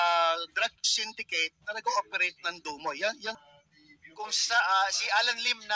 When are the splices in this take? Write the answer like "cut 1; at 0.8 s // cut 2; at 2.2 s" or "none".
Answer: cut 1; at 3.4 s